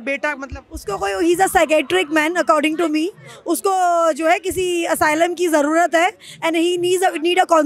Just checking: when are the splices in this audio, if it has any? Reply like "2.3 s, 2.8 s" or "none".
none